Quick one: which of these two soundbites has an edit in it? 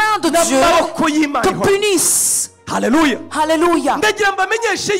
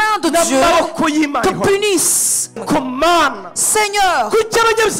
second; 1 cut; at 2.6 s

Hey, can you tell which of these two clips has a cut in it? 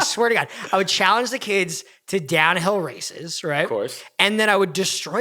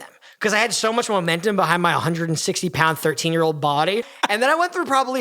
second; 1 cut; at 4.1 s

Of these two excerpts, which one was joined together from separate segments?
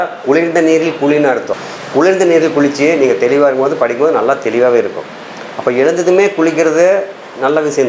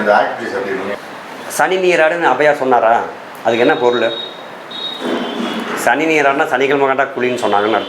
second; 1 cut; at 0.9 s

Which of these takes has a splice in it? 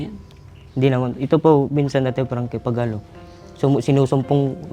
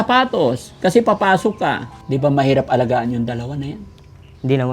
second; 1 cut; at 1.9 s

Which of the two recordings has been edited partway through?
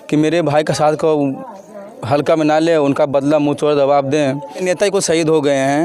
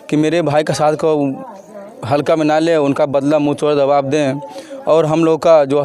first; 1 cut; at 4.6 s

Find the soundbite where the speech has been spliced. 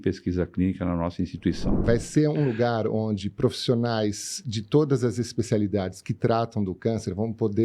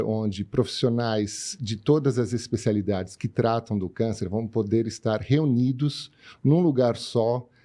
first; 1 cut; at 1.8 s

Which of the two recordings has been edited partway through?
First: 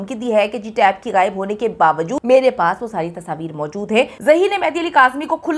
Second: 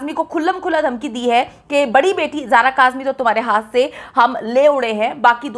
first; 2 cuts; at 2.2 s, 4.1 s

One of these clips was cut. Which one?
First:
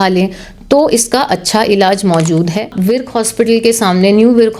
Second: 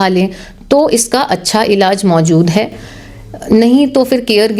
first; 1 cut; at 2.7 s

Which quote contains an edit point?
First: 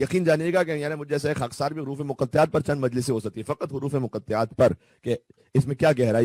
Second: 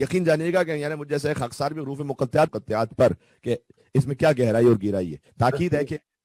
second; 2 cuts; at 2.5 s, 5.2 s

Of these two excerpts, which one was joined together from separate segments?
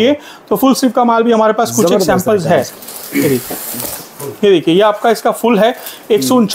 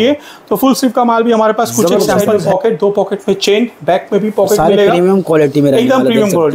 second; 1 cut; at 2.3 s

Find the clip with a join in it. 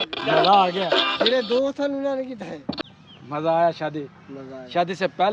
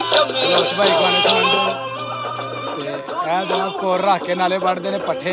first; 1 cut; at 2.8 s

